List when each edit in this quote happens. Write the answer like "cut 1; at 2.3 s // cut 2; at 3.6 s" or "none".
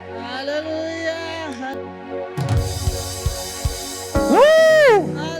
cut 1; at 1.7 s